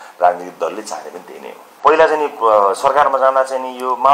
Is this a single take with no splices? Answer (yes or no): no